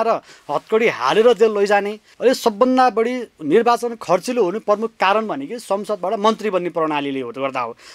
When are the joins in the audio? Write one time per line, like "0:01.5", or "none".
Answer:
0:02.0